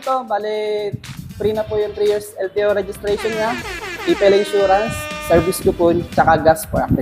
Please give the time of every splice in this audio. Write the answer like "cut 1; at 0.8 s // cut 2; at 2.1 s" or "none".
none